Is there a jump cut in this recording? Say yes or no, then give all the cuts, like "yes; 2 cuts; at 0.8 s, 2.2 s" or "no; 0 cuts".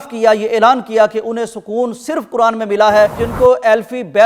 yes; 1 cut; at 3.2 s